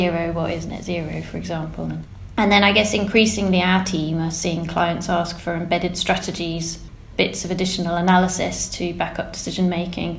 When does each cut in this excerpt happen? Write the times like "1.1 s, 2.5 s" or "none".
none